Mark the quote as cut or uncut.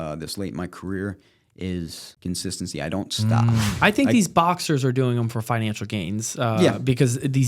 cut